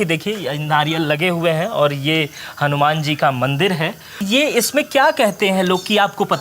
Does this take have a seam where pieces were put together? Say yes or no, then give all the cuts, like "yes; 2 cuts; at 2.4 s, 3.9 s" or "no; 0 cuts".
yes; 1 cut; at 4.2 s